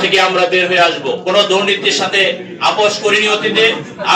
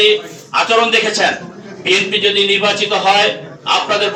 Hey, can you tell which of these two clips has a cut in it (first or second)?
first